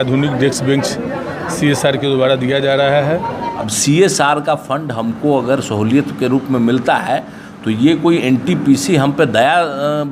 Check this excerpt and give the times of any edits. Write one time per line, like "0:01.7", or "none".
0:03.6